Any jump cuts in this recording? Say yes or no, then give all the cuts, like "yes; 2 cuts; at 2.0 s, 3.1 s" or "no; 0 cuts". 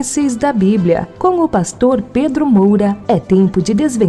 no; 0 cuts